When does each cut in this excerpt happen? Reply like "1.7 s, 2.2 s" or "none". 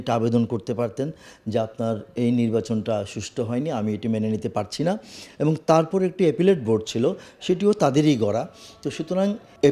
none